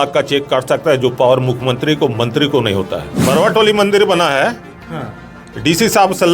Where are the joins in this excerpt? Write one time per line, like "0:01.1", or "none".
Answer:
0:03.1